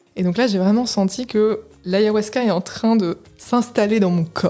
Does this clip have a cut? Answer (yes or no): yes